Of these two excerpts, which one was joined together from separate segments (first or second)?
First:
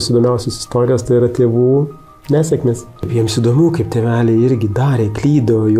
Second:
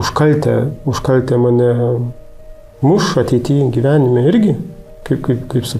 first